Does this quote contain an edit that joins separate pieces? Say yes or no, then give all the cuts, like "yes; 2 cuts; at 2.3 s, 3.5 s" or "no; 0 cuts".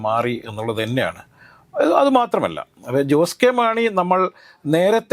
no; 0 cuts